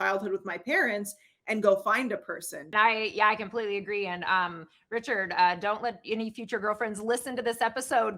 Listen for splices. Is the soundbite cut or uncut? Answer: cut